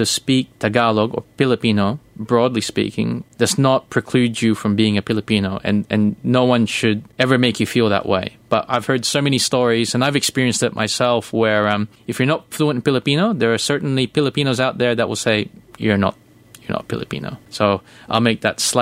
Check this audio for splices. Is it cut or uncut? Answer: cut